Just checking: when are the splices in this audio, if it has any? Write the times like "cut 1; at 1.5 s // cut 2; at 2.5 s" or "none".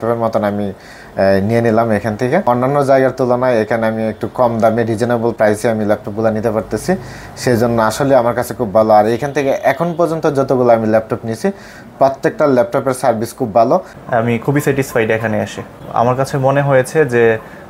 cut 1; at 2.5 s // cut 2; at 14.0 s // cut 3; at 15.8 s